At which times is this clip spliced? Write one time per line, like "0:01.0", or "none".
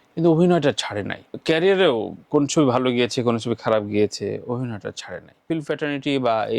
0:05.5